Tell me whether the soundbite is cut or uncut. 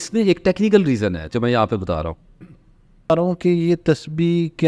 cut